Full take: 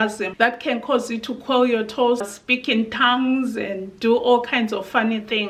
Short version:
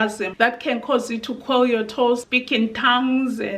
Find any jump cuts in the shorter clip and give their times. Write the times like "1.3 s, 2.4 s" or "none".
2.3 s